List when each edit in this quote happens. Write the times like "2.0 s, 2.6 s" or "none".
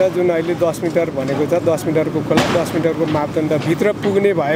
none